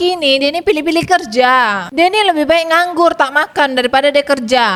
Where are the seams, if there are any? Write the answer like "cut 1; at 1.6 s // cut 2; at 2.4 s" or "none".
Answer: none